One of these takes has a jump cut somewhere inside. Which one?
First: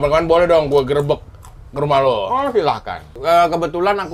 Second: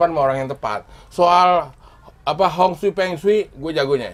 first; 1 cut; at 3.1 s

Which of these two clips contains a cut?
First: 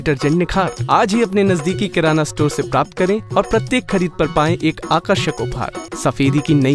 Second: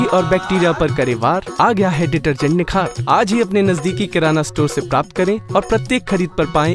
first; 1 cut; at 5.8 s

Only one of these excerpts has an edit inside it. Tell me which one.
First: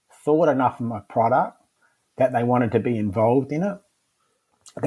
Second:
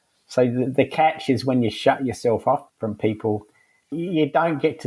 second; 2 cuts; at 2.7 s, 3.9 s

